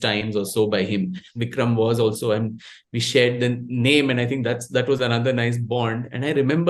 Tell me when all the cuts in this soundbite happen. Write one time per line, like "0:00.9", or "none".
0:01.4